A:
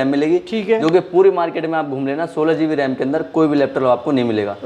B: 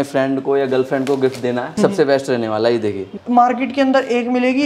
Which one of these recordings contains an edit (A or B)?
B